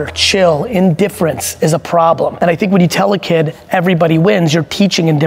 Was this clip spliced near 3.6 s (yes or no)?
no